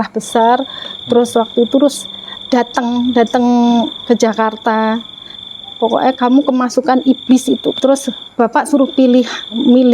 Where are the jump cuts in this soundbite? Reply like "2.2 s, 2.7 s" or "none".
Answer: 7.7 s